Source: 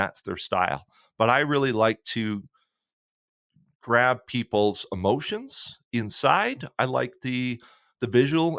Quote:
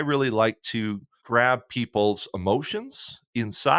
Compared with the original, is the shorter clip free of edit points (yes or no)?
no